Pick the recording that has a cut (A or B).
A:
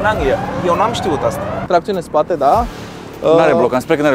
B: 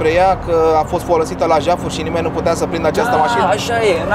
A